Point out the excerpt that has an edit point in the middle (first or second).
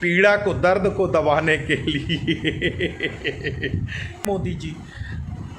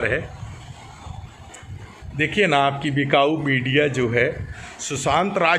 first